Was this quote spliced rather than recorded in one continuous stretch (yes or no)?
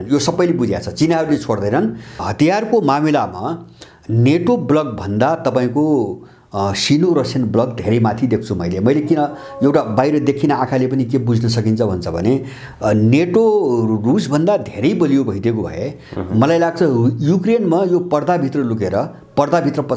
yes